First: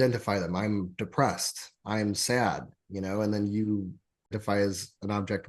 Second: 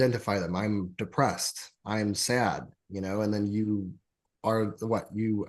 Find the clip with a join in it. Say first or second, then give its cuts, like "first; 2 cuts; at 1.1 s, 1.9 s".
first; 1 cut; at 4.4 s